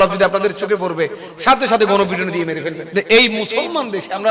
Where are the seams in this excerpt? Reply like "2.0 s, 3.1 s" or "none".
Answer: 2.8 s